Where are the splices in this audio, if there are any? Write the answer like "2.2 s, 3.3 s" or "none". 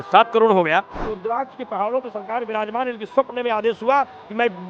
1.0 s